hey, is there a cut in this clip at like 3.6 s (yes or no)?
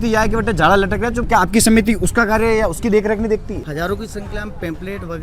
yes